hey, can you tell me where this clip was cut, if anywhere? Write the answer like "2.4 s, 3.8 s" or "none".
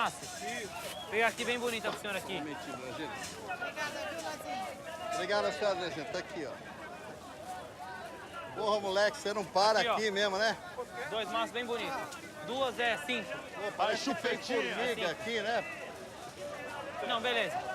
8.0 s

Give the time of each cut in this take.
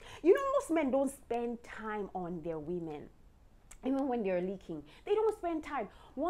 none

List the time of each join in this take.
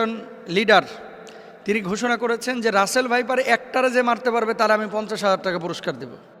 none

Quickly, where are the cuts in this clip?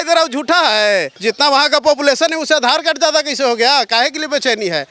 1.1 s

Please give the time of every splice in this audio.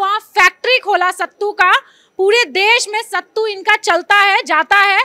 none

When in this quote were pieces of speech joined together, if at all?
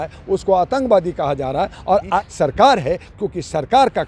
2.1 s

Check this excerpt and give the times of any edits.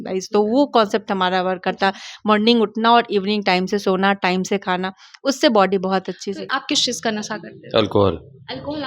6.4 s

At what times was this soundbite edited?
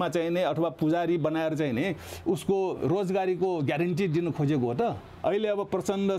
5.1 s

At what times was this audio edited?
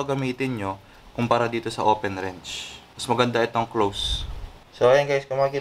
4.7 s

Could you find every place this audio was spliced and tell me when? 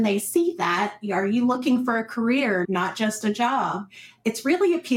2.6 s

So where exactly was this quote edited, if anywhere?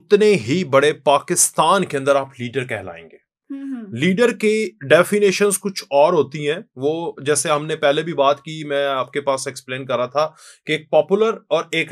none

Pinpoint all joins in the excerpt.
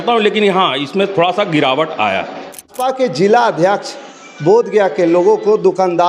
2.7 s

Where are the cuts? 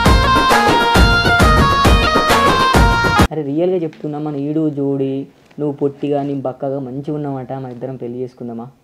3.3 s

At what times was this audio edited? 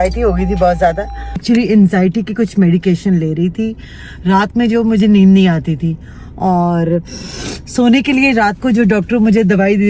1.4 s

